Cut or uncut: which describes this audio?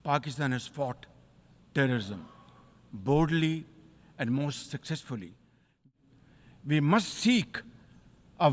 cut